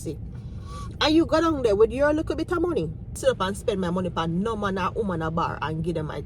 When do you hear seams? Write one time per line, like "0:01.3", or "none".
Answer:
0:03.2